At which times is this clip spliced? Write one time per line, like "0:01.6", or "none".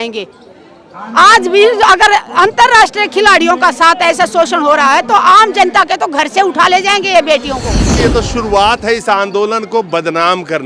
0:07.9